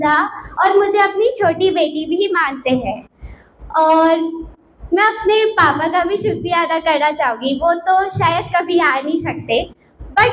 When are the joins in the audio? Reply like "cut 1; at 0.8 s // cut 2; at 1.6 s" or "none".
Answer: none